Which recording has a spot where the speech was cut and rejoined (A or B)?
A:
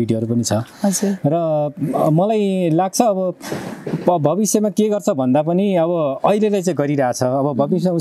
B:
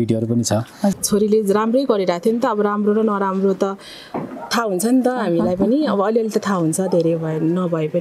B